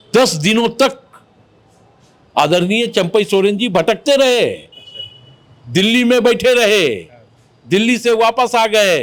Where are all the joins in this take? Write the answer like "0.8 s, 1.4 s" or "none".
none